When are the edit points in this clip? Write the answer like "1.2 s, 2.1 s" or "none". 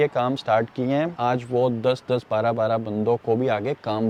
none